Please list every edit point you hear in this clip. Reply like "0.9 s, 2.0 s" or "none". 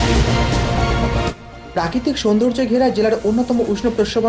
1.2 s